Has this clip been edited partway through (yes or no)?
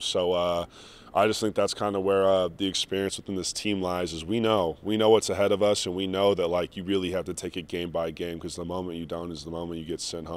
no